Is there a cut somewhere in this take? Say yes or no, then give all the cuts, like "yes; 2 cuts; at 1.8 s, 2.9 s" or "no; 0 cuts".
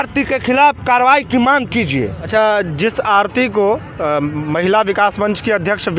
no; 0 cuts